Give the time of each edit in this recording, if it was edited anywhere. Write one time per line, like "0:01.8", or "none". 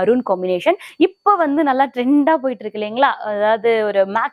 none